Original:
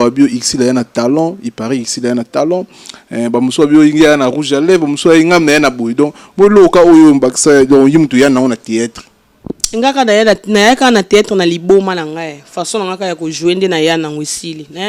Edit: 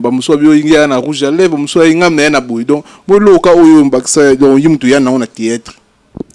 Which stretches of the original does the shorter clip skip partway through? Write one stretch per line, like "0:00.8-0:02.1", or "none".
none